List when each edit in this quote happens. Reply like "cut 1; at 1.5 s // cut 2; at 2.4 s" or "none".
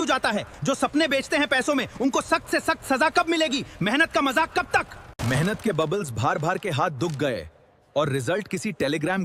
cut 1; at 5.0 s